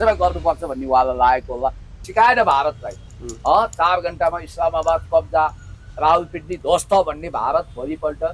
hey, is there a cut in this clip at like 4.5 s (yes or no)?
no